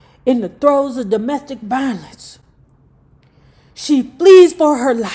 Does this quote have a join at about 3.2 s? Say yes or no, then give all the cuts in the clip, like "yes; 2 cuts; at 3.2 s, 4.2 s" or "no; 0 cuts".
no; 0 cuts